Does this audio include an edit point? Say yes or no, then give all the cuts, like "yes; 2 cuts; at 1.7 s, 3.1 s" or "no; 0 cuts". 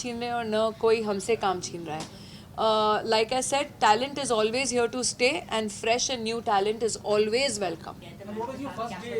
no; 0 cuts